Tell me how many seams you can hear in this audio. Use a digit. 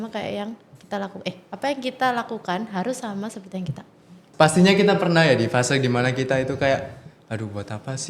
1